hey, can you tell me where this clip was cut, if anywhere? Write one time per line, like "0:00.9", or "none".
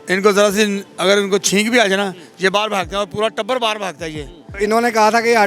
0:04.5

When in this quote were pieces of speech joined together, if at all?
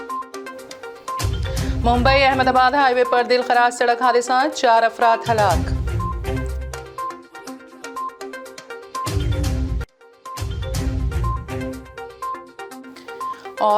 0:01.7

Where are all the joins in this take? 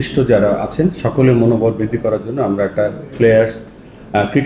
none

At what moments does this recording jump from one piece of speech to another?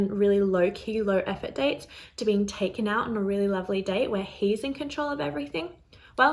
none

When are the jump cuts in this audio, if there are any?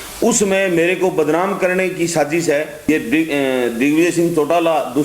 0:02.9

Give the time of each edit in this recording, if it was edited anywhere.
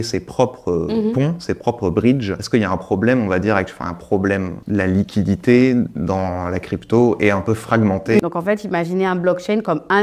0:02.4
0:04.6
0:08.2

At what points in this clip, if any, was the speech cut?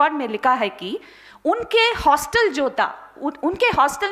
none

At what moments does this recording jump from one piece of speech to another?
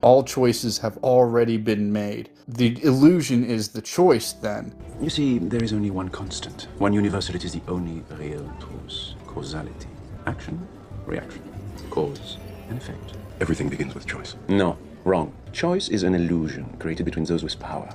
none

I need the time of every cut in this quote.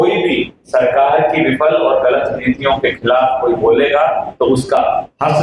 none

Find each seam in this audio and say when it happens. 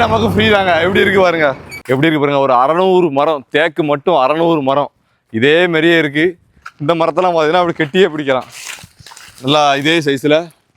0:01.7

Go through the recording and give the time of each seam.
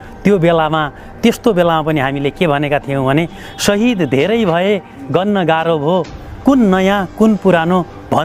none

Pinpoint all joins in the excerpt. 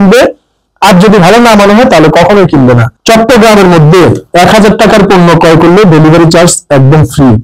0:02.9

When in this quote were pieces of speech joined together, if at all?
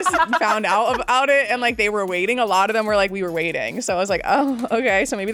none

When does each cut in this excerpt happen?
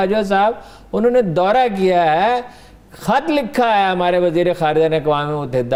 none

